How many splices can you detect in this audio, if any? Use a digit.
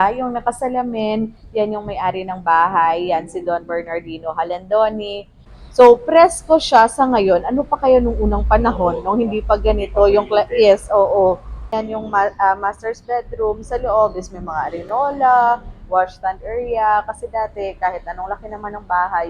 2